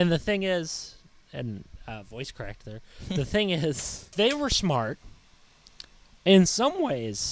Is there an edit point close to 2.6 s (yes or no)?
no